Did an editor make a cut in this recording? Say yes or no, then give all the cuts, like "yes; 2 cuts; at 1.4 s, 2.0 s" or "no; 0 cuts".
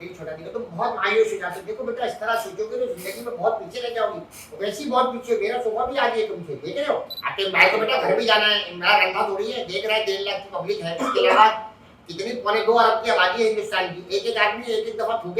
yes; 1 cut; at 7.2 s